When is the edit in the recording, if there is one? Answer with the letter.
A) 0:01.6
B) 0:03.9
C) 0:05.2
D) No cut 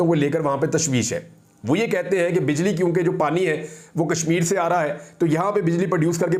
D